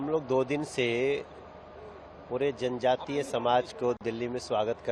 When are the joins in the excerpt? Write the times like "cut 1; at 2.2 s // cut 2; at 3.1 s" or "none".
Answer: none

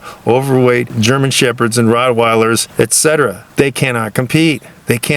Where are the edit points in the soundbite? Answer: cut 1; at 0.9 s // cut 2; at 2.7 s // cut 3; at 3.4 s

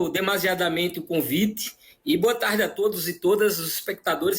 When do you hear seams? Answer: none

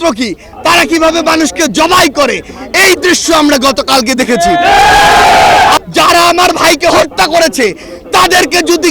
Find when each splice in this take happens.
cut 1; at 5.8 s

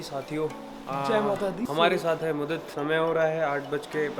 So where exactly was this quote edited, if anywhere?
cut 1; at 2.7 s

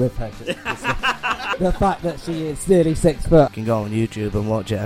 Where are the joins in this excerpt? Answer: cut 1; at 1.0 s // cut 2; at 3.5 s

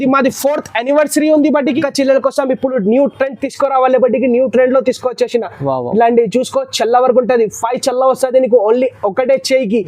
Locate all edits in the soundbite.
cut 1; at 1.8 s

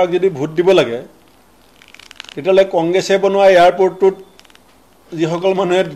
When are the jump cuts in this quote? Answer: none

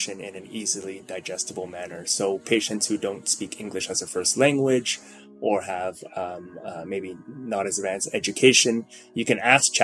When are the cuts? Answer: none

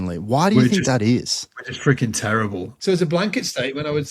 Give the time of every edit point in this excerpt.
cut 1; at 2.7 s

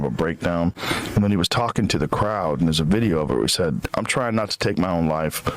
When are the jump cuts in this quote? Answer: cut 1; at 3.8 s

